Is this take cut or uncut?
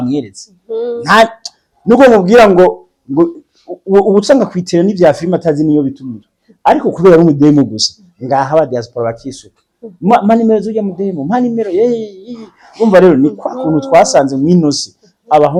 uncut